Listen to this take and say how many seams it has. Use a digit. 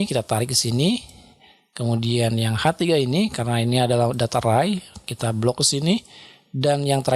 0